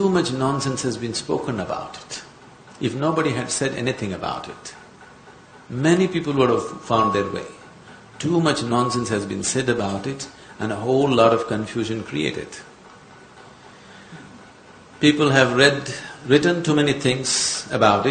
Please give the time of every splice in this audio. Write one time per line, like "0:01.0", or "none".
0:12.4